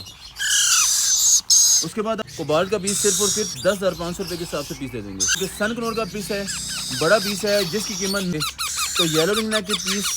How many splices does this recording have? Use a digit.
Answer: 3